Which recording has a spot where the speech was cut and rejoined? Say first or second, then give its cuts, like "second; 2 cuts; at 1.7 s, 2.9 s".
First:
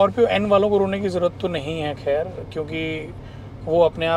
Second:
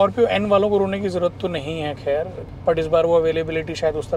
second; 1 cut; at 2.4 s